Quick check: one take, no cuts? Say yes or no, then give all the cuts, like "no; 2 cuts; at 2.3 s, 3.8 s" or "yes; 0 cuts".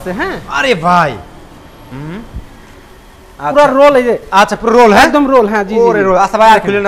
yes; 0 cuts